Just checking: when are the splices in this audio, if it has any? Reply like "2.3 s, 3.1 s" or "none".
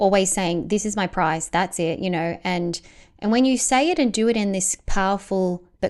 none